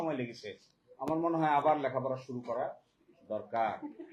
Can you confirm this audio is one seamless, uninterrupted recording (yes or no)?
yes